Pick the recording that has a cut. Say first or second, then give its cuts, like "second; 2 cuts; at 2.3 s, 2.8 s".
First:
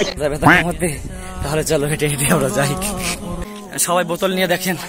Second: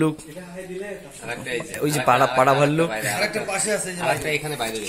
first; 1 cut; at 3.4 s